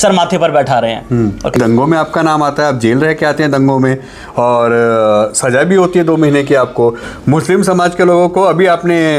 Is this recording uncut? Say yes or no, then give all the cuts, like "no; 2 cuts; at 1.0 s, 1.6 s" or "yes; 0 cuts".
no; 2 cuts; at 1.5 s, 7.1 s